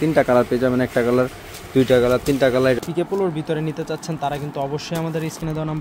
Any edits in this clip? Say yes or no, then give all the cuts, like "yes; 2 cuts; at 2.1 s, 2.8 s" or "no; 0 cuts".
yes; 1 cut; at 2.8 s